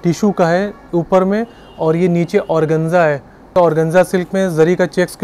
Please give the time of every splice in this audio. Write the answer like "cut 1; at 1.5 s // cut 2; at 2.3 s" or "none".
cut 1; at 3.5 s